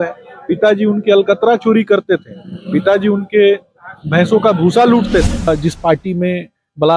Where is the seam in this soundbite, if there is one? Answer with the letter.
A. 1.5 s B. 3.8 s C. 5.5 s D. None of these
C